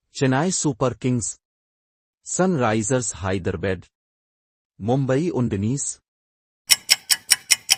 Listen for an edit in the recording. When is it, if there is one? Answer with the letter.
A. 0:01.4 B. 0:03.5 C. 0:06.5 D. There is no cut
D